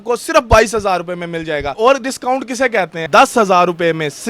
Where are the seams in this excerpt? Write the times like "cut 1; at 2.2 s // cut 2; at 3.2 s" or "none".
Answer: cut 1; at 1.7 s // cut 2; at 3.0 s